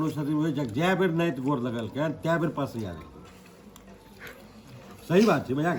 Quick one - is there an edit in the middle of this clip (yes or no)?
no